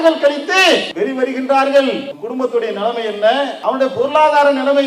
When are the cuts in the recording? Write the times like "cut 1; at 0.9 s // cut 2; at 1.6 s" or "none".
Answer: cut 1; at 0.9 s // cut 2; at 2.2 s // cut 3; at 3.6 s

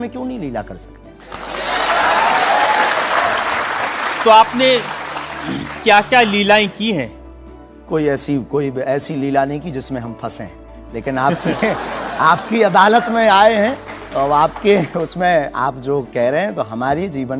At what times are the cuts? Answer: none

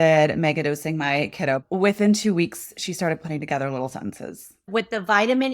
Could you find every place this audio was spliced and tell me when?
cut 1; at 1.6 s // cut 2; at 4.5 s

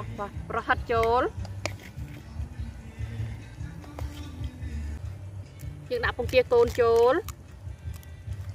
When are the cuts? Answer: cut 1; at 5.1 s

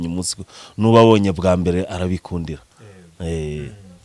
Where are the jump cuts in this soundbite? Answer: none

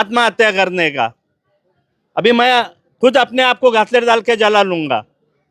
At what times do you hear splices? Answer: none

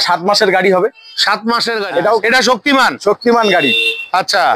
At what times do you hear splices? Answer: cut 1; at 1.8 s

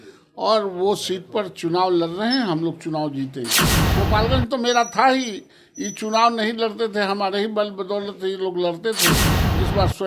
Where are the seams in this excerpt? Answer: cut 1; at 3.8 s

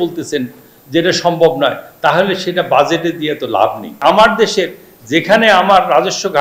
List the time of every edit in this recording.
cut 1; at 4.0 s

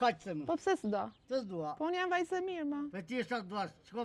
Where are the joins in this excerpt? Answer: none

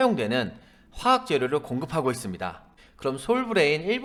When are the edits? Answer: none

